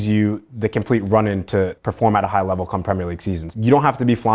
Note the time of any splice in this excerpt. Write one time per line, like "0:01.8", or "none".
0:03.4